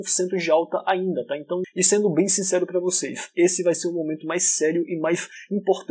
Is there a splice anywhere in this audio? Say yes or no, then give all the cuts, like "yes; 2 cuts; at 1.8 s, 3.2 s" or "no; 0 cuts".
yes; 1 cut; at 1.7 s